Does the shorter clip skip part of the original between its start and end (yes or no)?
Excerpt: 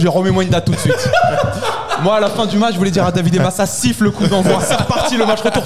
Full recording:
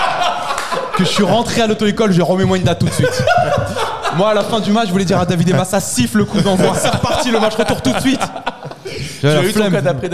no